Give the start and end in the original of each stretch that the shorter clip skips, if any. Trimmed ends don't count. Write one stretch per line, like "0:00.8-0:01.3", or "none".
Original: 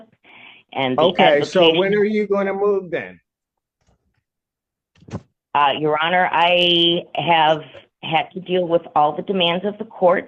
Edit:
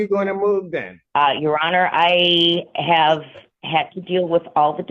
0:03.1-0:05.3

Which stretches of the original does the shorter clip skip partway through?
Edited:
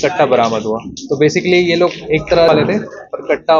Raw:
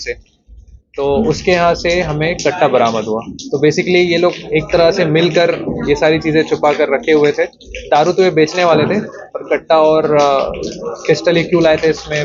0:04.9-0:08.7

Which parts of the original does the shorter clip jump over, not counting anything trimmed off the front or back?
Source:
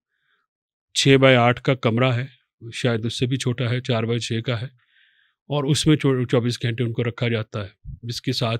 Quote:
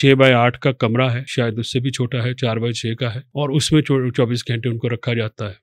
0:02.3-0:02.7
0:04.7-0:05.4

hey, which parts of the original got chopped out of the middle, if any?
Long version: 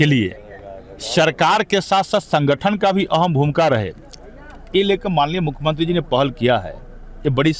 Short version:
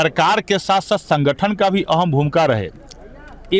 none

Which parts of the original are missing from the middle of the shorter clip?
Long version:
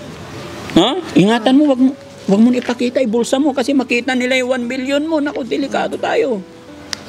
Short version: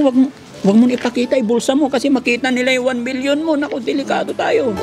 none

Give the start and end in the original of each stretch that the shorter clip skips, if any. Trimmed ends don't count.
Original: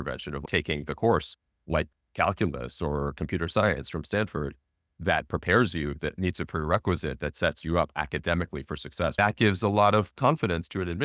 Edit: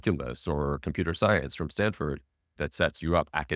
0:04.9-0:07.2

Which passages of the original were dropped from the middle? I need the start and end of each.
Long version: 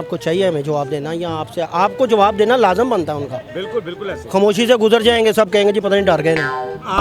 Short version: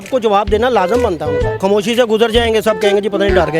0:03.3-0:04.1

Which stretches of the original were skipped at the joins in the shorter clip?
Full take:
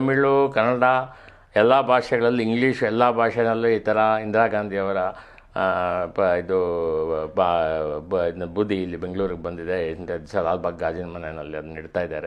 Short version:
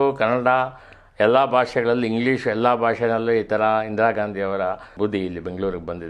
0:05.2-0:08.4

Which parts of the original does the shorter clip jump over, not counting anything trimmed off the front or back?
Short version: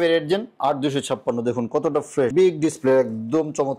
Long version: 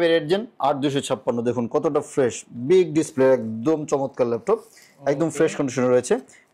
0:02.3-0:02.6

